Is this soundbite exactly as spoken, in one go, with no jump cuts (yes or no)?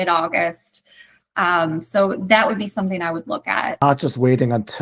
no